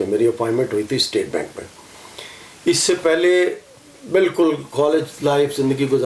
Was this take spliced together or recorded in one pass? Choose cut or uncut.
uncut